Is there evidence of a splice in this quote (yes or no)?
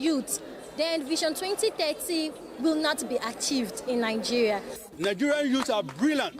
yes